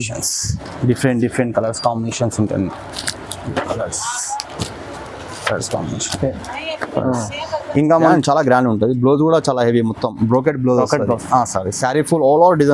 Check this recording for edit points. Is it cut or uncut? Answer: cut